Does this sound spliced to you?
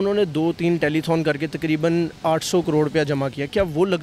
no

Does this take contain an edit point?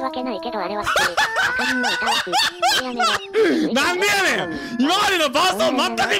no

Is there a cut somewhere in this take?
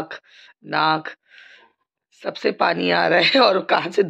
no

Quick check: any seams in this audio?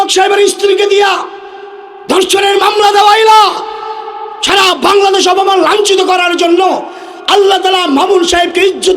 no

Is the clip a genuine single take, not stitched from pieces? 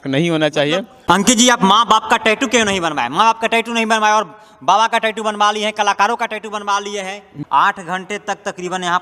no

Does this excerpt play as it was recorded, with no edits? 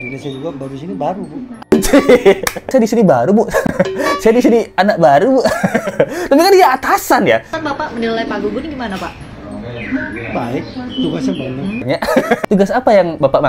no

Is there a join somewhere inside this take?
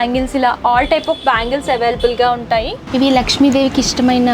yes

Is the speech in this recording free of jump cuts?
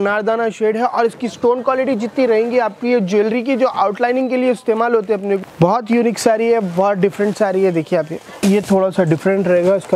no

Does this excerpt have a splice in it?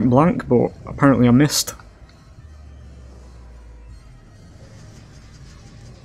no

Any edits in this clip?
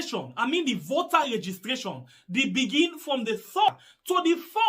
yes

